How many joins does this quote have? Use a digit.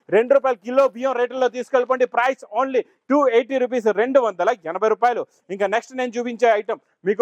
0